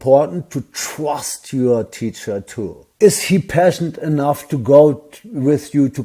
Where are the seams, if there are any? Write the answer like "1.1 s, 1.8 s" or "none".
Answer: 2.8 s